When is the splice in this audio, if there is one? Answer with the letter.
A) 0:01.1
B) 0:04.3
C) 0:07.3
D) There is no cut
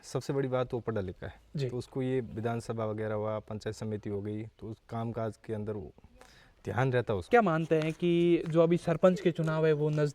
C